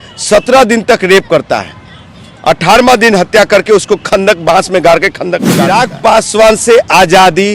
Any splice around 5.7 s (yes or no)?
yes